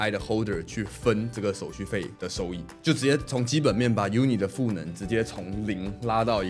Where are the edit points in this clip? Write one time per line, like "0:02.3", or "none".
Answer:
none